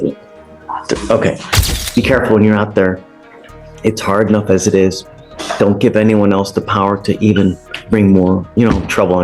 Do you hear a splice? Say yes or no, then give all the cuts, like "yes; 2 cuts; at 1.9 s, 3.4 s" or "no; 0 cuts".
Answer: yes; 1 cut; at 1.5 s